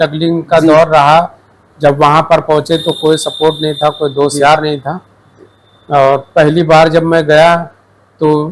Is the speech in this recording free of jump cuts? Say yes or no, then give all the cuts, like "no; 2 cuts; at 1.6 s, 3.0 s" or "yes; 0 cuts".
yes; 0 cuts